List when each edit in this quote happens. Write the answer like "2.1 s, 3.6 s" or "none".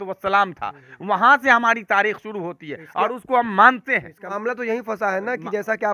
4.2 s